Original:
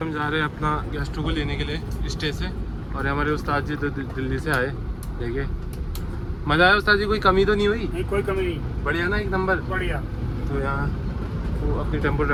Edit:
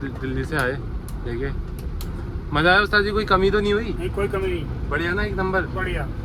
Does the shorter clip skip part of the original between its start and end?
no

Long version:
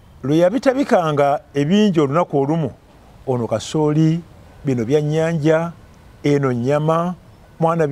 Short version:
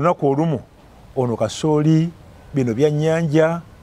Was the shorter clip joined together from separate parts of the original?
no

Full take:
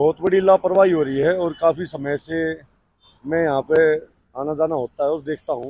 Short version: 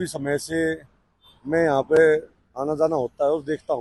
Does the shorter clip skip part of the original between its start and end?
no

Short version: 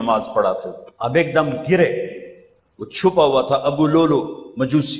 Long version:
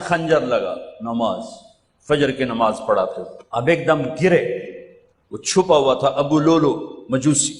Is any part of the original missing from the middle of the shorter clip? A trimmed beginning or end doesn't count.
no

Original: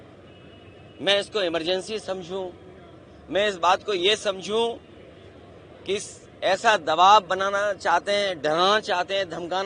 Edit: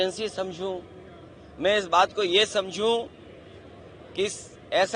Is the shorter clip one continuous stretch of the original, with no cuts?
yes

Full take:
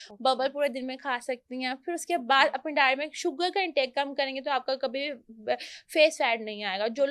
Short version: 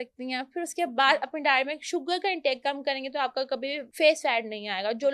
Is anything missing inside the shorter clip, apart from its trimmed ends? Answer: yes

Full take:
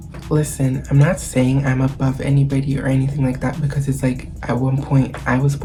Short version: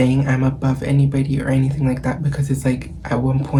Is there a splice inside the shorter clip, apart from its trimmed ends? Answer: no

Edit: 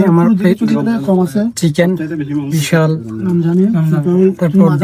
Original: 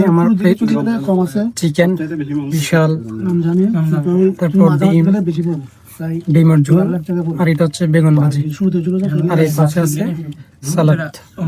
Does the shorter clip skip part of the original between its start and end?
no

